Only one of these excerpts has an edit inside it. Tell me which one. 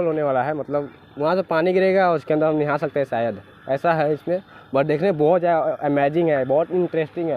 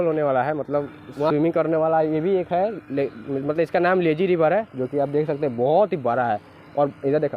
second; 1 cut; at 1.3 s

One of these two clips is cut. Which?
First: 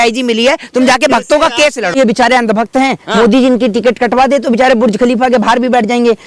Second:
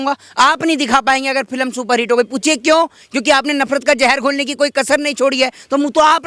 first; 1 cut; at 2.0 s

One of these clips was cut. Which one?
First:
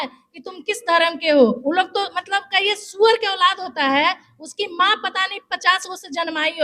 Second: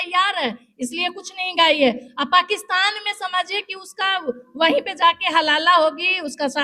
first; 1 cut; at 1.6 s

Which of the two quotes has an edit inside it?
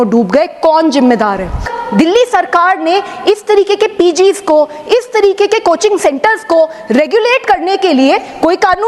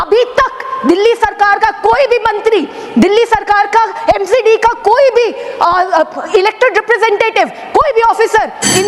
first; 1 cut; at 1.7 s

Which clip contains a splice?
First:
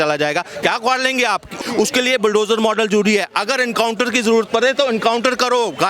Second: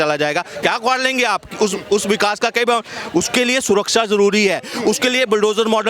first; 1 cut; at 1.5 s

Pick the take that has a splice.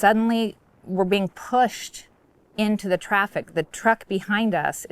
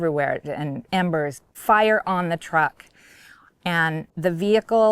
second; 2 cuts; at 1.5 s, 4.1 s

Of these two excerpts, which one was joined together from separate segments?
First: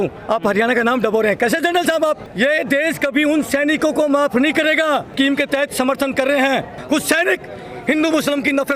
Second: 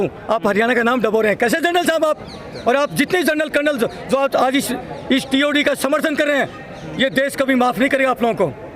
first; 3 cuts; at 2.3 s, 5.1 s, 6.7 s

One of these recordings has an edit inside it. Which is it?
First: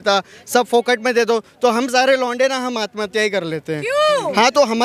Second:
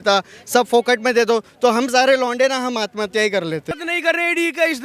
second; 1 cut; at 3.7 s

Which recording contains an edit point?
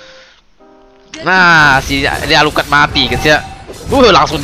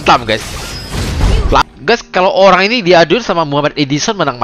second; 1 cut; at 1.6 s

